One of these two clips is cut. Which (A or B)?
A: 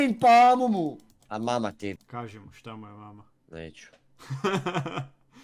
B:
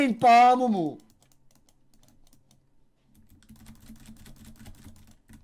A